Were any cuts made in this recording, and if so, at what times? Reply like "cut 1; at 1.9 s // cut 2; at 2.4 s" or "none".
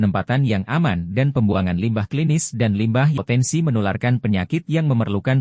cut 1; at 3.2 s

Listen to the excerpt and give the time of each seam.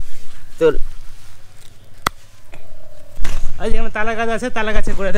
cut 1; at 3.1 s

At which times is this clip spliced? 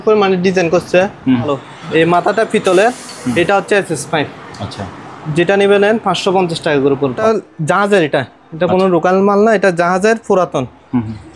cut 1; at 1.6 s // cut 2; at 7.2 s

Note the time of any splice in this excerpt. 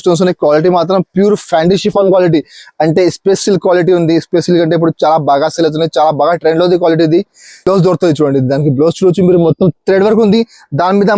cut 1; at 7.6 s

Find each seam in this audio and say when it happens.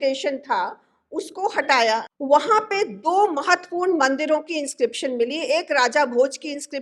cut 1; at 2.1 s

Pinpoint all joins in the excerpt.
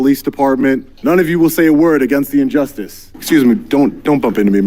cut 1; at 0.9 s // cut 2; at 3.1 s

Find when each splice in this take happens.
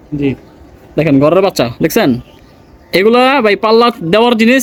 none

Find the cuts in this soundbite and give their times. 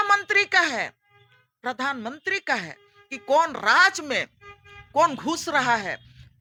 none

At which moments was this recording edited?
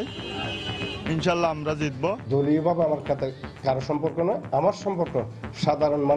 cut 1; at 2.2 s

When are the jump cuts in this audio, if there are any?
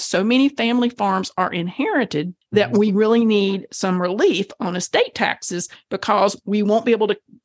cut 1; at 2.4 s

